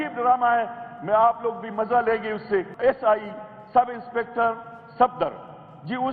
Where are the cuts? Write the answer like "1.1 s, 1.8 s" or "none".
2.7 s